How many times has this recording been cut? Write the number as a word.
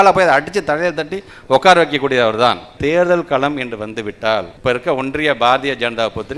two